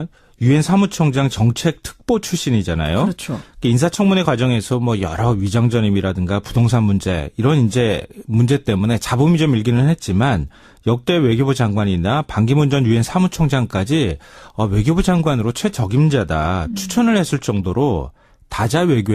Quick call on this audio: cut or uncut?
uncut